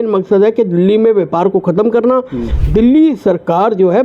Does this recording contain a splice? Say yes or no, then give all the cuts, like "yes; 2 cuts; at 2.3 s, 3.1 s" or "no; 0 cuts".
yes; 1 cut; at 2.5 s